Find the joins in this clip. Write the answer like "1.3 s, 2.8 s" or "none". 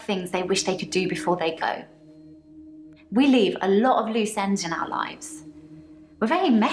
none